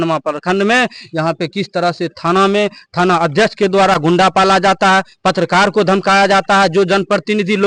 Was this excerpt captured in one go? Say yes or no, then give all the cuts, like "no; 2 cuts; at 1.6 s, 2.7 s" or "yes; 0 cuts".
yes; 0 cuts